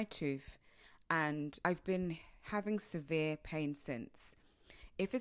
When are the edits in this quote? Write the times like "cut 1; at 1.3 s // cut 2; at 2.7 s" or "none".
cut 1; at 1.6 s